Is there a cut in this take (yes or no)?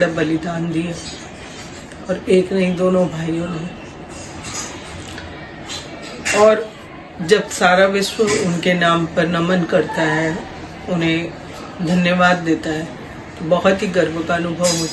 no